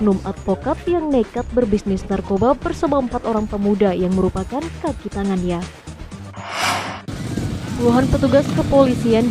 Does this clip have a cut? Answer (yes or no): yes